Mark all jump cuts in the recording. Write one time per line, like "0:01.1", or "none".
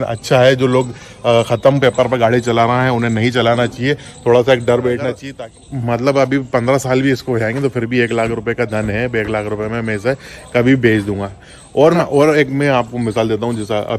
0:05.2